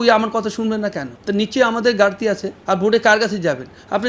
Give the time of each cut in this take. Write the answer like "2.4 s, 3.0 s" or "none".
1.1 s, 2.5 s